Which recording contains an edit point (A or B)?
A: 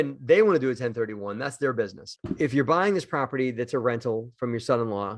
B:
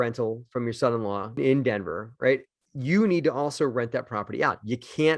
A